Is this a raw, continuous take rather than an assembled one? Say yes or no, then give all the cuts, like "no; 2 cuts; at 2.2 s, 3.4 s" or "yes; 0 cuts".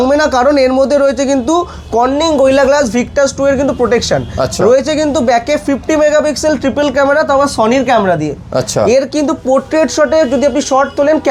yes; 0 cuts